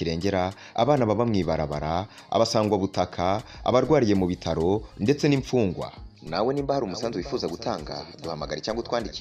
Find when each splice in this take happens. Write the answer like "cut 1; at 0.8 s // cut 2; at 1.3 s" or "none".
none